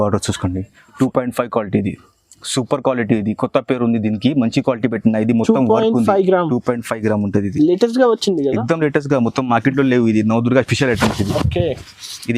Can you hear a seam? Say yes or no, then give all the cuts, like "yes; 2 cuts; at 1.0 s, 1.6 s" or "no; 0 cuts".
yes; 1 cut; at 1.0 s